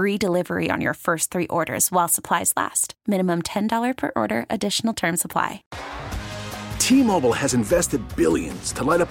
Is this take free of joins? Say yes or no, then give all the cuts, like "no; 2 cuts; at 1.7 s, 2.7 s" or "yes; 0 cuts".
no; 1 cut; at 5.7 s